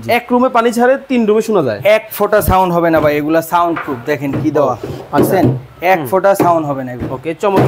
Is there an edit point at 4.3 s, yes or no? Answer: no